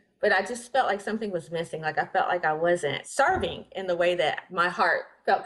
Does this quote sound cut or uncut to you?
cut